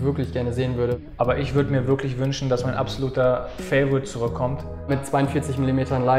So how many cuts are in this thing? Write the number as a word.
two